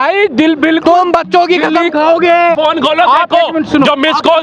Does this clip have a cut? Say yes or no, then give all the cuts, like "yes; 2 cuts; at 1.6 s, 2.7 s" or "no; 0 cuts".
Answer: yes; 1 cut; at 2.6 s